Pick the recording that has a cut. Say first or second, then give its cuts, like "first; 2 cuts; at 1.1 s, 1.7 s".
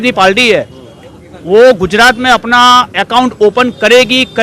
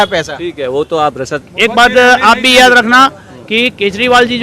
second; 1 cut; at 1.5 s